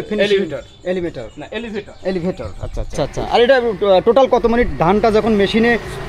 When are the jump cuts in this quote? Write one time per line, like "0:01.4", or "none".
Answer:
0:03.4